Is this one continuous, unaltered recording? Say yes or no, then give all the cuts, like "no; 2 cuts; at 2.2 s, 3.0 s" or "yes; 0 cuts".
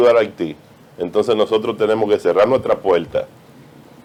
yes; 0 cuts